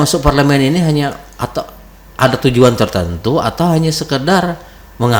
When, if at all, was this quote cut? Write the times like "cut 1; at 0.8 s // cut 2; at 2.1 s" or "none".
none